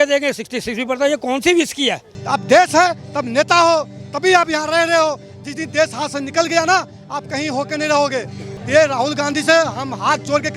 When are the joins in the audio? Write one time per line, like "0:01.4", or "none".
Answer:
0:02.1
0:08.5